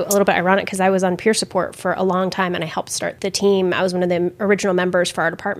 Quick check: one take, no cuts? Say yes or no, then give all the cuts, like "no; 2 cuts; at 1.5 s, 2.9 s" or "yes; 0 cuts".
no; 1 cut; at 3.1 s